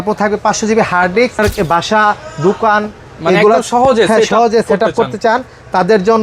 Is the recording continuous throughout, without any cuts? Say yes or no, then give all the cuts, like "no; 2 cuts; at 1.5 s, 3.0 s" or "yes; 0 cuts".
no; 1 cut; at 1.4 s